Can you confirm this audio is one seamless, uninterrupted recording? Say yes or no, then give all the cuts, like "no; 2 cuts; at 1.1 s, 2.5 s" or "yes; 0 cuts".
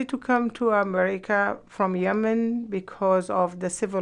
yes; 0 cuts